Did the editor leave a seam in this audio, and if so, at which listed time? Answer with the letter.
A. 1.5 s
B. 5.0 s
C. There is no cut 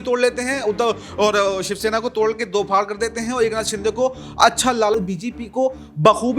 B